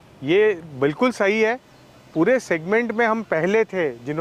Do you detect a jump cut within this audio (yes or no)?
no